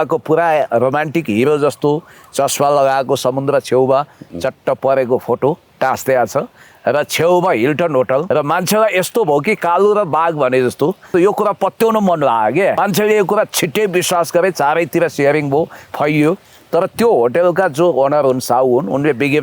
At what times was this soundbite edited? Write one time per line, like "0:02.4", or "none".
0:08.3
0:11.1
0:12.8